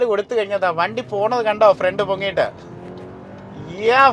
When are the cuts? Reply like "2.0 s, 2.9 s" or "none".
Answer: none